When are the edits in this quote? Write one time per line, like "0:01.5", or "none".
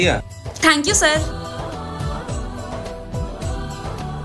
none